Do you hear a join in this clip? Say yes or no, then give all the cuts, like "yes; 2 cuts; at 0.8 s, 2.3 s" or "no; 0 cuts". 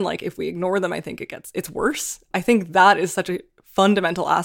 yes; 1 cut; at 2.2 s